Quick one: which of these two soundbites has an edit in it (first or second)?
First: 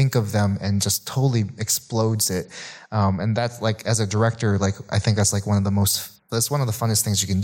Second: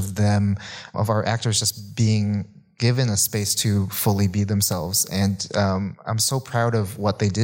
second